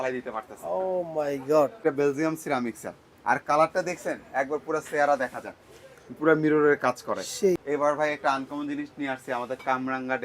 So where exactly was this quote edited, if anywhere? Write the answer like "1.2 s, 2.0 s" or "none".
1.8 s, 7.6 s

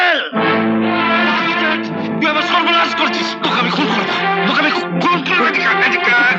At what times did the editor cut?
none

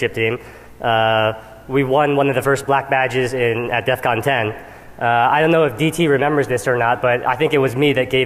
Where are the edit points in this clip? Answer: 7.0 s

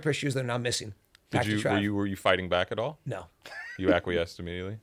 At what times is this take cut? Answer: none

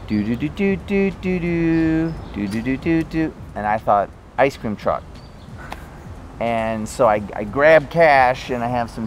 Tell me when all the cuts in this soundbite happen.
none

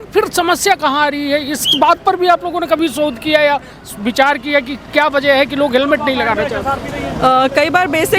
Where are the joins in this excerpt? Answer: none

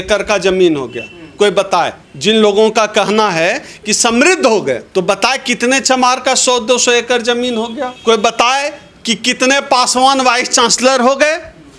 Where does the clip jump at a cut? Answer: 2.0 s, 4.8 s, 7.9 s

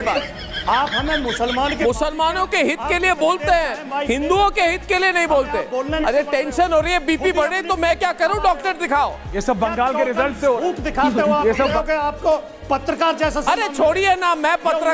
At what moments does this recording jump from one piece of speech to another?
1.8 s, 6.0 s, 11.8 s

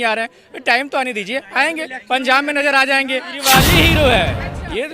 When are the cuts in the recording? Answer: 3.4 s

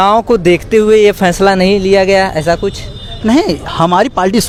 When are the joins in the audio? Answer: none

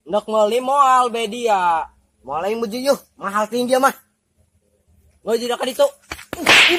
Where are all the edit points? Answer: none

